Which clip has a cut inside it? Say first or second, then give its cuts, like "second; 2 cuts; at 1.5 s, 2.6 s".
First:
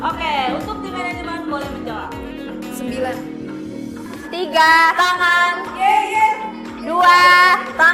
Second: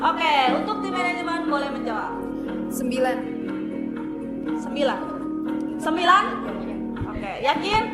first; 1 cut; at 4.1 s